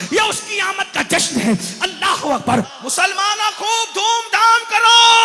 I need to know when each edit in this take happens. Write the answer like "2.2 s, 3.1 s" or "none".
2.7 s

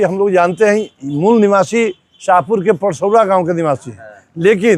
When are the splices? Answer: none

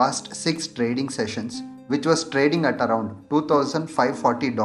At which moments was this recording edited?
none

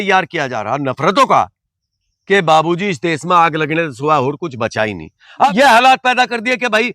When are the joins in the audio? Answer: 5.1 s

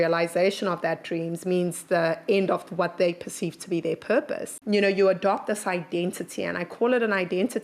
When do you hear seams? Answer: 4.5 s

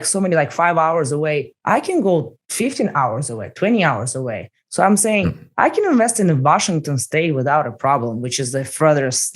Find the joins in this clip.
1.5 s, 2.4 s

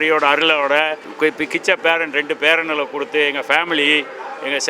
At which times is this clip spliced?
1.0 s

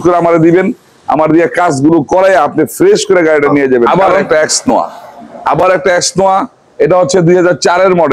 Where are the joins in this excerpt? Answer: 3.9 s

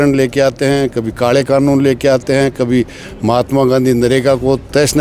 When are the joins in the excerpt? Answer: none

